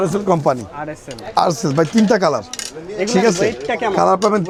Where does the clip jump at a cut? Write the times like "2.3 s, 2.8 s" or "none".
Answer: none